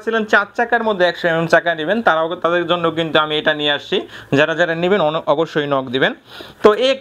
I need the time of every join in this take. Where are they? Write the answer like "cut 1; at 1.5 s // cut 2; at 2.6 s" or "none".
none